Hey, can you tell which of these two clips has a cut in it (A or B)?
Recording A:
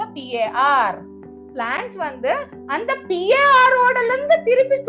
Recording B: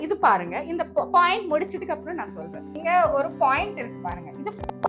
B